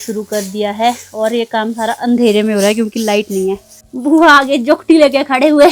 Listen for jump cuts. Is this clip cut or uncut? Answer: uncut